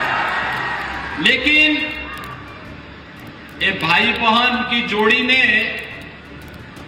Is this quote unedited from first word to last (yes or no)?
yes